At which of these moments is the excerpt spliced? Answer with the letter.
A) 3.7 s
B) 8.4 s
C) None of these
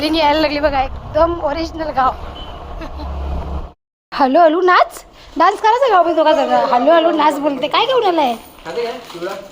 A